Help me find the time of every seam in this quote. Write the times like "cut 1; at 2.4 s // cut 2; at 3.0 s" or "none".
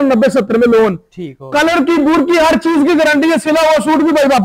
none